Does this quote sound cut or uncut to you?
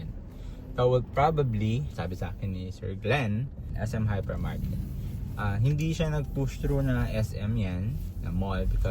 cut